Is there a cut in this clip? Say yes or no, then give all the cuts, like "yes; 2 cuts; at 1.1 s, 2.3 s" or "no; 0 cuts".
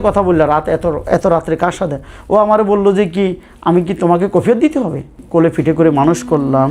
yes; 1 cut; at 5.2 s